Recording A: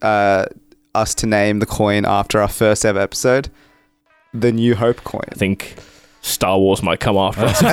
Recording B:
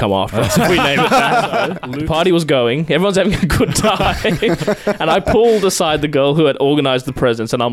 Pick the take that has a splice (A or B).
B